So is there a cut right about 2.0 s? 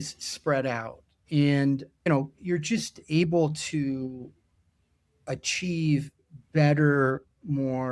no; 0 cuts

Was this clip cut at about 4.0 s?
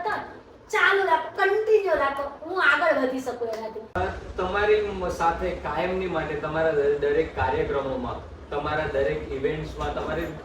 yes; 1 cut; at 4.0 s

